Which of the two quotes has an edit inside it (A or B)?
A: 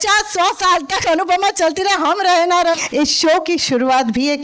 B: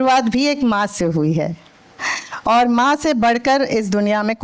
A